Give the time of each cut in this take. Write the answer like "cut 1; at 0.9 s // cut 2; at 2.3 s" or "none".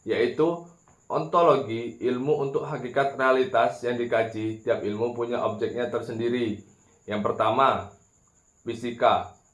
cut 1; at 6.0 s